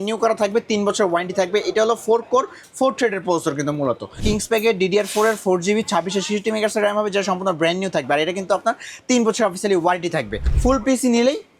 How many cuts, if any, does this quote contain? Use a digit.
2